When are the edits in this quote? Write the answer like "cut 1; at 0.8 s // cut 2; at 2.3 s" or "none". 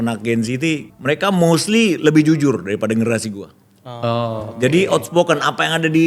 cut 1; at 0.9 s